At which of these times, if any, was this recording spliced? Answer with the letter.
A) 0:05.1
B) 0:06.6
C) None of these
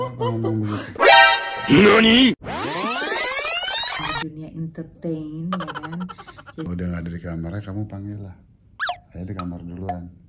B